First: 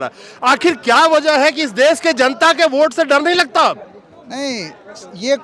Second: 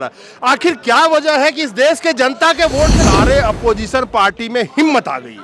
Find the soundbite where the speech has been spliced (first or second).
second